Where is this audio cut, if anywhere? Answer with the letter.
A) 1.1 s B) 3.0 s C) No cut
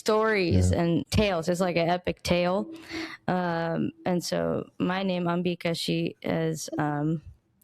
A